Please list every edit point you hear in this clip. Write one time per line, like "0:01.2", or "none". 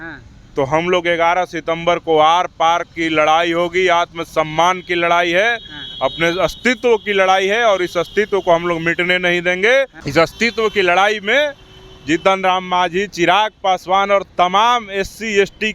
0:10.0